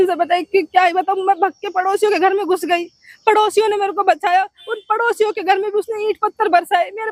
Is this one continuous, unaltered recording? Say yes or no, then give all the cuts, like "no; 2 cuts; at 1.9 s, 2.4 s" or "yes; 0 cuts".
yes; 0 cuts